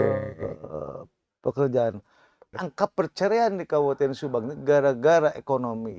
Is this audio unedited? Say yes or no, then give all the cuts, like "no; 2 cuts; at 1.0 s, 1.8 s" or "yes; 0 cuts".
no; 1 cut; at 2.6 s